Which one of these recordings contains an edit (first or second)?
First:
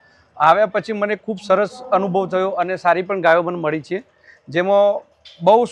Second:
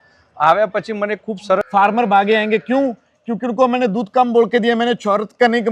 second